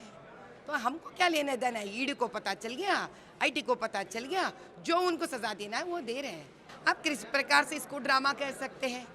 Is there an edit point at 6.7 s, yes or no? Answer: yes